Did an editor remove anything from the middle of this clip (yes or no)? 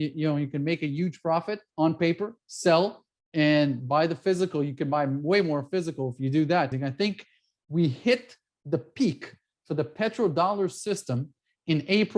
yes